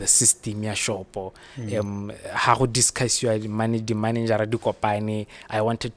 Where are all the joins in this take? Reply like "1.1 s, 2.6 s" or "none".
none